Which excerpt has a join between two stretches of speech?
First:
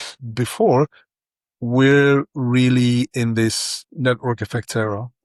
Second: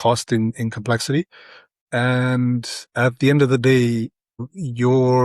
second; 3 cuts; at 1.8 s, 2.8 s, 4.4 s

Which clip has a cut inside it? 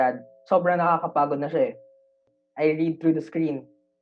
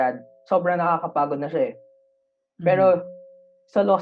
first; 1 cut; at 2.4 s

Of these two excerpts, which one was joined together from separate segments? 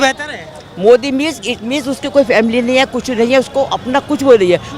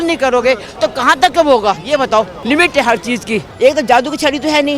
second; 2 cuts; at 2.4 s, 3.5 s

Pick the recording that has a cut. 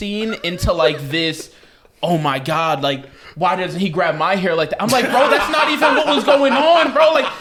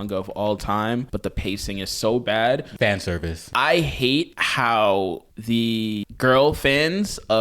second; 5 cuts; at 1.1 s, 3.0 s, 4.4 s, 5.3 s, 6.0 s

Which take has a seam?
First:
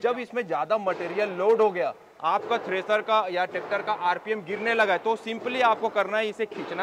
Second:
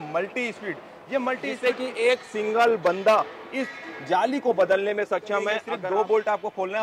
second; 2 cuts; at 1.5 s, 5.7 s

